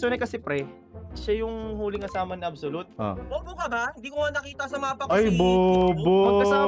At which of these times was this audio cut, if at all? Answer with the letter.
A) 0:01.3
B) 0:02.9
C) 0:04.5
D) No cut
B